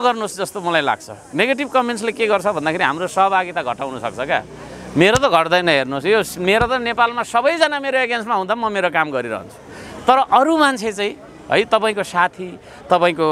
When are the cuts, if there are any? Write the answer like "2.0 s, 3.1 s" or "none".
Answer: none